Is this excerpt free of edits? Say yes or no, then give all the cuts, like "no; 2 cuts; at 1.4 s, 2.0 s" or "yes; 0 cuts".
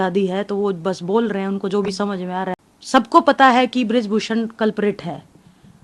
no; 1 cut; at 2.7 s